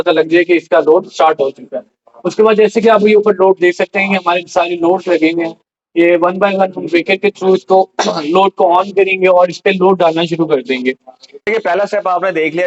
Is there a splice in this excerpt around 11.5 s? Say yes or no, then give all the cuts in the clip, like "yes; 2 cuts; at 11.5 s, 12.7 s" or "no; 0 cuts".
yes; 1 cut; at 11.5 s